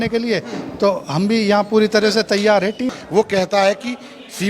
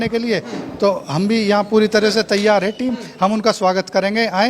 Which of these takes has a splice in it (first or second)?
first